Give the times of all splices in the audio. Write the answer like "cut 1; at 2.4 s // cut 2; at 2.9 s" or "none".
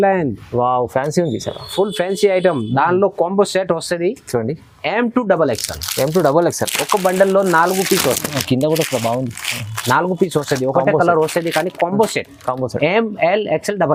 none